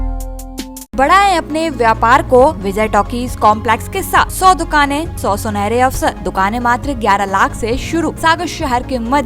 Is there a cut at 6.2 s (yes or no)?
yes